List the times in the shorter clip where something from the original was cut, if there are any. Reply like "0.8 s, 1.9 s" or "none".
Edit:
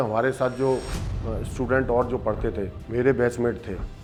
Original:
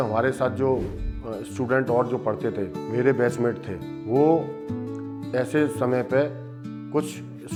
none